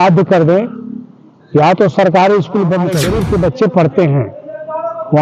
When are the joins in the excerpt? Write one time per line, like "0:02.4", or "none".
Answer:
0:03.0